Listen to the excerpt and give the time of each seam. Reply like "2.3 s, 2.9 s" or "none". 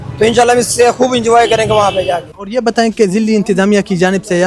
2.3 s